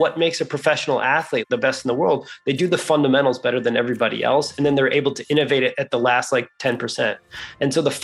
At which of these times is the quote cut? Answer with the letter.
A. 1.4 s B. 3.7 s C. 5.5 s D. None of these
A